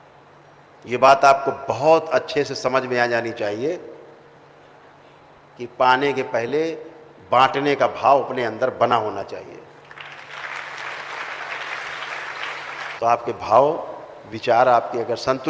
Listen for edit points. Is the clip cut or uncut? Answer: cut